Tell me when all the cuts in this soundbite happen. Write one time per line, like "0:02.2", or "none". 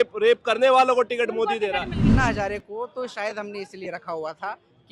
0:02.1